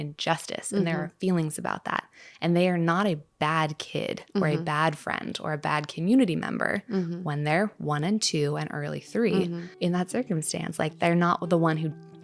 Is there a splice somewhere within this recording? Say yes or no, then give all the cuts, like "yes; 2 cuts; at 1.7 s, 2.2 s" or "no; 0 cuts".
yes; 1 cut; at 9.6 s